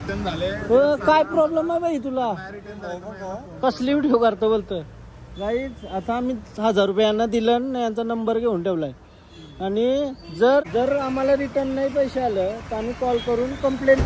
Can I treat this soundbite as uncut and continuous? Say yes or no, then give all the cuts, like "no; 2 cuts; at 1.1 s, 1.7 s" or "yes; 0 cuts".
yes; 0 cuts